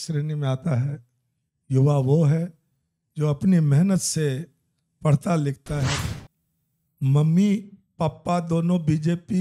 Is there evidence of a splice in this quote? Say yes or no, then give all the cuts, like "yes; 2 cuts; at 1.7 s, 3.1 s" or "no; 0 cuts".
yes; 1 cut; at 6.0 s